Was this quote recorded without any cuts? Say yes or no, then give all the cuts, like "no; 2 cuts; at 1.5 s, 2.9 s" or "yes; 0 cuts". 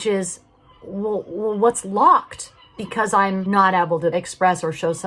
no; 2 cuts; at 3.4 s, 4.1 s